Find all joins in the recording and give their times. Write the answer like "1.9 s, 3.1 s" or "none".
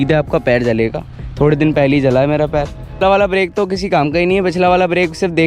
2.9 s